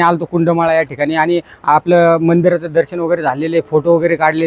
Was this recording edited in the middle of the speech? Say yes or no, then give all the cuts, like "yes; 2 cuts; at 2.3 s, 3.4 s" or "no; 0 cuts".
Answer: no; 0 cuts